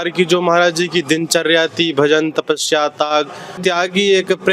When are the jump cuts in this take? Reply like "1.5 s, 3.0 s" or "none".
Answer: 3.6 s

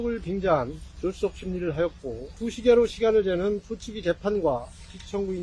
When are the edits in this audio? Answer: 2.3 s

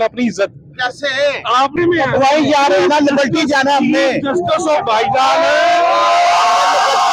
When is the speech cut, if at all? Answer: 1.7 s

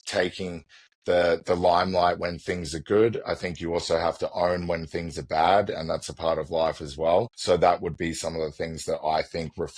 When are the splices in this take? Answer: 7.3 s

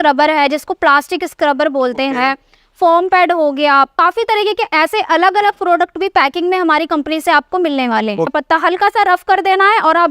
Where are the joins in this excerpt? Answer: 3.9 s, 8.3 s

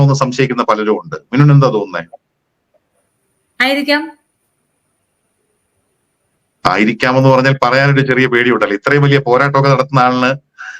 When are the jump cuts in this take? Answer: 8.3 s

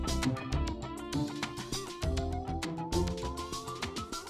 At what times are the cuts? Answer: none

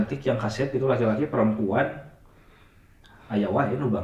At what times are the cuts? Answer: none

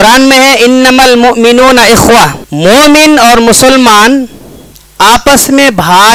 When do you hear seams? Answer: 2.4 s

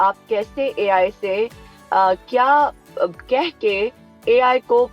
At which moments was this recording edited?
none

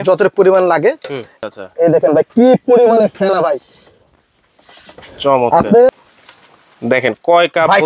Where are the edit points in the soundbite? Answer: 1.3 s, 5.9 s

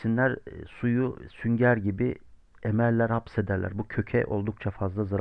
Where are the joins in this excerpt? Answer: none

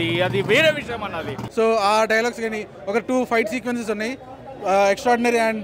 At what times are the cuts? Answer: 1.4 s

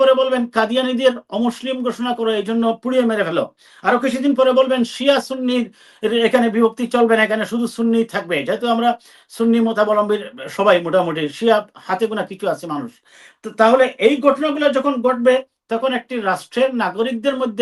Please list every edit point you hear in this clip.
none

